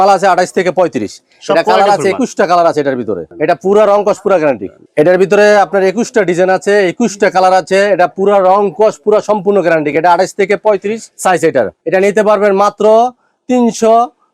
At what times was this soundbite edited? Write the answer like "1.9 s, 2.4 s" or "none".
none